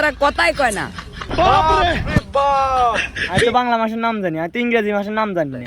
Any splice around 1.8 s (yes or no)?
no